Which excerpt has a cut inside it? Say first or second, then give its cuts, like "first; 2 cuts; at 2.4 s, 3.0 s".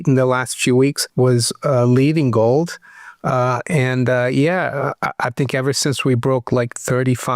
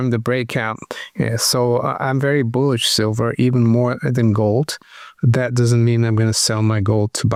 first; 1 cut; at 1.0 s